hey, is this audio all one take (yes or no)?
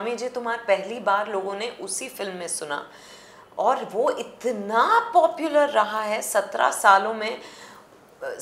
yes